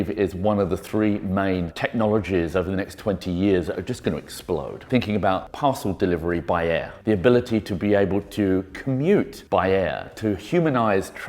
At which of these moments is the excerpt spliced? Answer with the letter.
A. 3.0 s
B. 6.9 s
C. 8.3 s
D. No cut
B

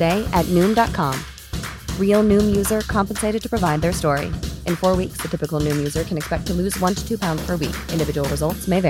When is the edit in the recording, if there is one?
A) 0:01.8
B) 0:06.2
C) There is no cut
C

